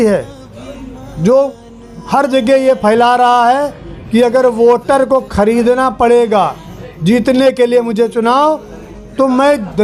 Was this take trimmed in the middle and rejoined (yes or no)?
no